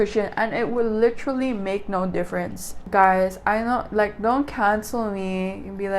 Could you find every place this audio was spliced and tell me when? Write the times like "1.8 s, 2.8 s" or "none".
2.7 s